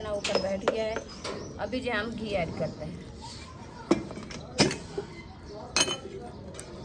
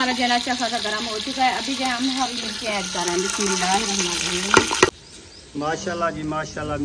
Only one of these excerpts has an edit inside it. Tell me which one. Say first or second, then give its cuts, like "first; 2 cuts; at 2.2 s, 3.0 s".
second; 1 cut; at 5.0 s